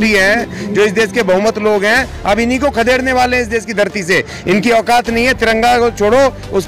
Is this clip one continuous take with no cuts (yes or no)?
yes